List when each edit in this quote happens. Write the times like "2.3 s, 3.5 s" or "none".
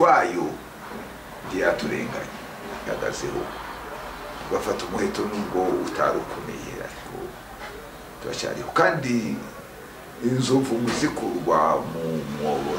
2.9 s